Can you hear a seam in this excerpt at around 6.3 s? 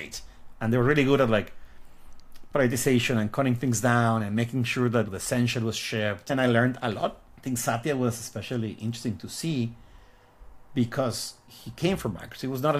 yes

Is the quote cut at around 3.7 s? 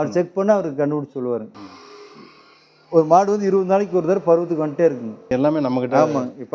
no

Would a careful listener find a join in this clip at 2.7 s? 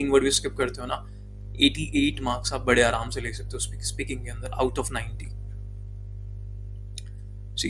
no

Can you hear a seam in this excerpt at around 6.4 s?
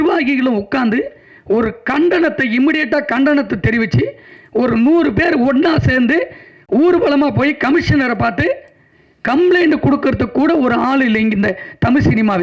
no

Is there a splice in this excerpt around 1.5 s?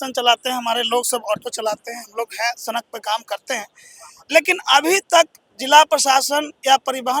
no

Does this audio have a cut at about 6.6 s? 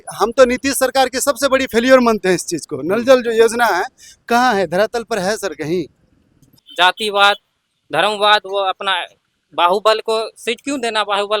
yes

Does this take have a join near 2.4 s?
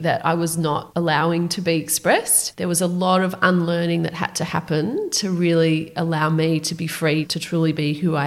yes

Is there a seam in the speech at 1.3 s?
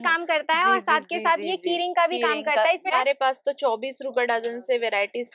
no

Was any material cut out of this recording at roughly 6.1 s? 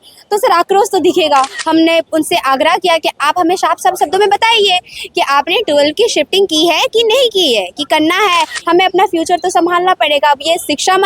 no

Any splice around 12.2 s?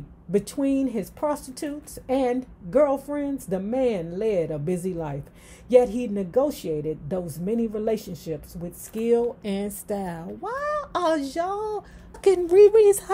yes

